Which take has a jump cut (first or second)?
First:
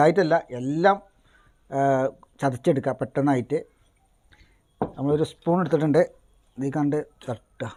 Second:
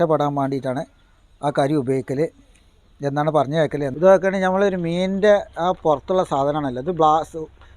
second